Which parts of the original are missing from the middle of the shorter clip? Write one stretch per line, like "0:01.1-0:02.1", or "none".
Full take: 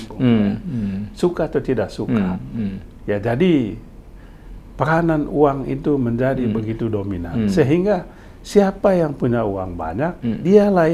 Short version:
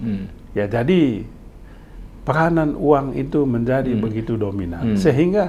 none